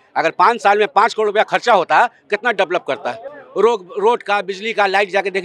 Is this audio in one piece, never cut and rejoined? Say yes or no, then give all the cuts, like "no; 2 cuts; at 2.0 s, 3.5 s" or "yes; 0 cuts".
yes; 0 cuts